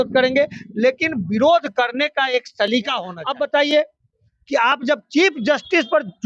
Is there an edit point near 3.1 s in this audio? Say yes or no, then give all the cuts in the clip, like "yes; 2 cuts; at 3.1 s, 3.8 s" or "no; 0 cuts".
yes; 1 cut; at 3.1 s